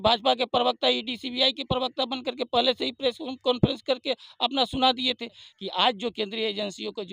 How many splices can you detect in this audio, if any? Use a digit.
1